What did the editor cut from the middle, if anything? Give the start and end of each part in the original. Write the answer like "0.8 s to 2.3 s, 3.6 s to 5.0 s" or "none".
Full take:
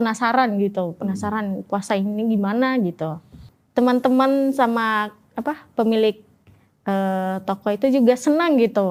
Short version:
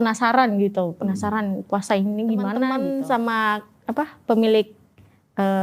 2.8 s to 4.2 s